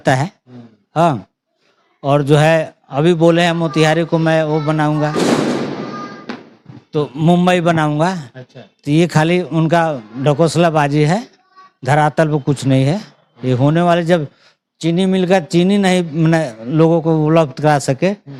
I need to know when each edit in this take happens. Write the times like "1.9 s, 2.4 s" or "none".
none